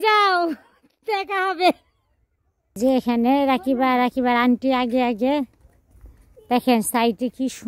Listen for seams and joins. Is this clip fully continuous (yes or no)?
no